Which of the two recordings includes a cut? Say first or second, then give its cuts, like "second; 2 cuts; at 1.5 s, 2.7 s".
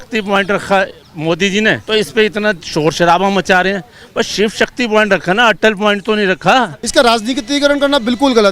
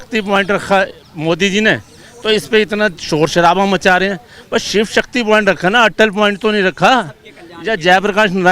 first; 2 cuts; at 1.8 s, 6.8 s